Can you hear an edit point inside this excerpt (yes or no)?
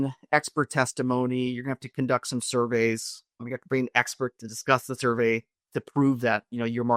no